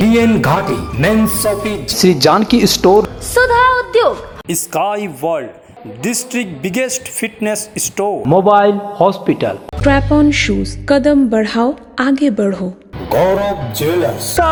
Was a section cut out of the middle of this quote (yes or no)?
no